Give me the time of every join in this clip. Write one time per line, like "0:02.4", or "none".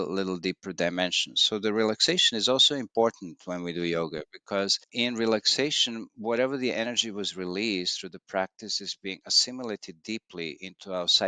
0:04.8